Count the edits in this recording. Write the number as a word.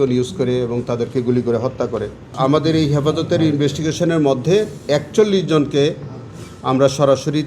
one